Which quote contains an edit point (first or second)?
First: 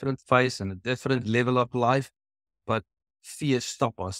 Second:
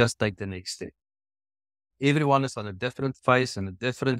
second